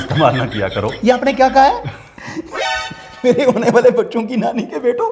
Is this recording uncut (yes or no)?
yes